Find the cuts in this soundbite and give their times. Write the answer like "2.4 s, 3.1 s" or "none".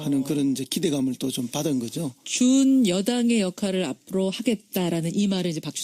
4.6 s